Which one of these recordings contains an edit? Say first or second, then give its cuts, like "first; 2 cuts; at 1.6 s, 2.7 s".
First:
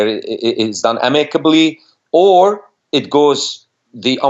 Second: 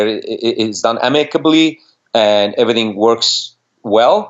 first; 1 cut; at 1.9 s